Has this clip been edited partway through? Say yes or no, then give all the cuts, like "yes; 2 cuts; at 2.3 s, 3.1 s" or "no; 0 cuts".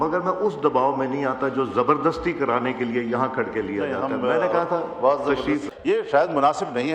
yes; 1 cut; at 5.6 s